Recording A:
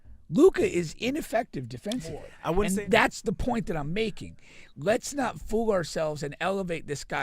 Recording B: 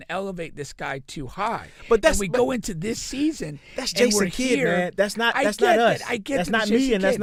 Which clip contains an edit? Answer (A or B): A